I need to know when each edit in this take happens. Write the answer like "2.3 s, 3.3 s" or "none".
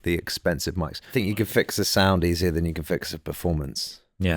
1.1 s